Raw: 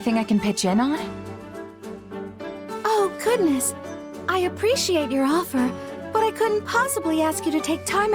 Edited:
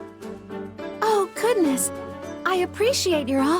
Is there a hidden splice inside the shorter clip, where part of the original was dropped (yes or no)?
yes